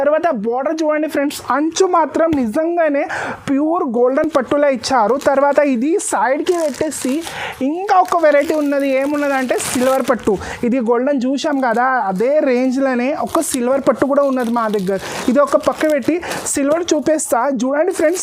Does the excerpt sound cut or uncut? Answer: uncut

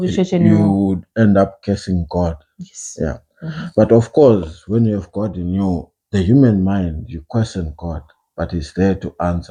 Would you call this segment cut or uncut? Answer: uncut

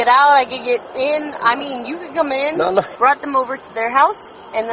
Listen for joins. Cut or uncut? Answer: cut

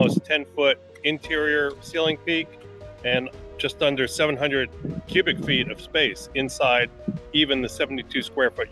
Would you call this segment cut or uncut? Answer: uncut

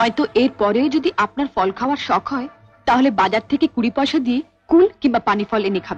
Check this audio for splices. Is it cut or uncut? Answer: uncut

